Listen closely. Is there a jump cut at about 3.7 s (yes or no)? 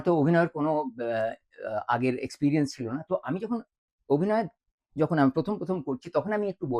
no